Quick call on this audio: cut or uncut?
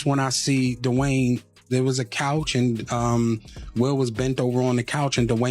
cut